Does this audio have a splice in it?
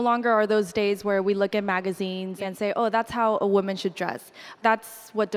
yes; 2 cuts; at 2.4 s, 4.5 s

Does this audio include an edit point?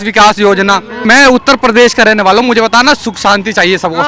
yes; 1 cut; at 1.0 s

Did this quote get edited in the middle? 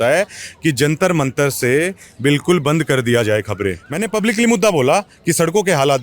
yes; 1 cut; at 3.9 s

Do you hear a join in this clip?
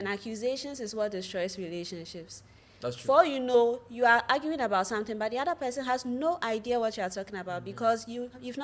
no; 0 cuts

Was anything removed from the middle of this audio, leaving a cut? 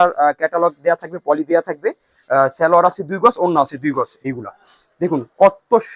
yes; 1 cut; at 4.2 s

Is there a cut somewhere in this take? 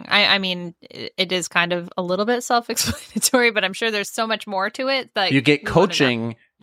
yes; 1 cut; at 5.3 s

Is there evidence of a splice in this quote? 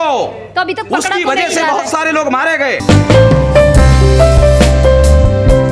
yes; 1 cut; at 2.8 s

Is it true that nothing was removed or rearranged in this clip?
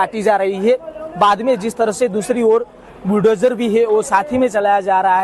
no; 1 cut; at 1.0 s

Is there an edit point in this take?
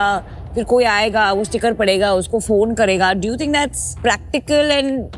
no; 0 cuts

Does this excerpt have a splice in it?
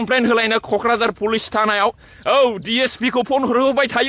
no; 0 cuts

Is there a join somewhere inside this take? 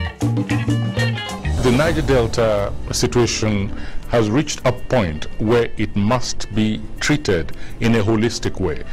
yes; 1 cut; at 1.6 s

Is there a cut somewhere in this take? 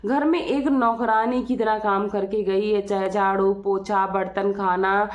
no; 0 cuts

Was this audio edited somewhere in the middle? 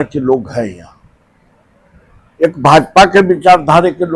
no; 0 cuts

